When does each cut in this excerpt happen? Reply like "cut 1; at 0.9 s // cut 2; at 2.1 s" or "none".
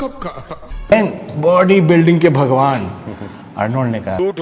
cut 1; at 0.9 s

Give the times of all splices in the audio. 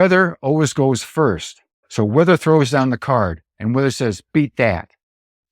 cut 1; at 1.8 s // cut 2; at 3.5 s

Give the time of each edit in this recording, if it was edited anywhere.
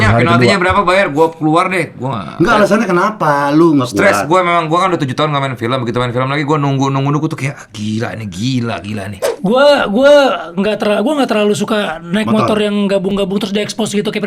cut 1; at 9.3 s

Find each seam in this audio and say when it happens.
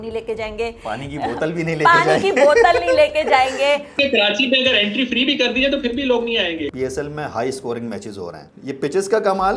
cut 1; at 4.0 s // cut 2; at 6.6 s

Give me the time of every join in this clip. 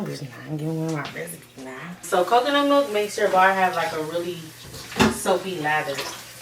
cut 1; at 2.0 s

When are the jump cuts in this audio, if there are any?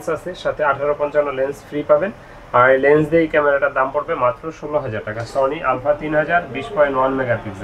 none

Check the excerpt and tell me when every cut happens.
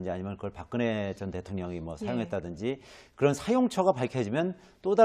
none

